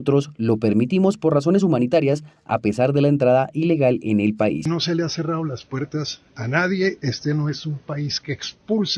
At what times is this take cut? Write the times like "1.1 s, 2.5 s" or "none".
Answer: 4.6 s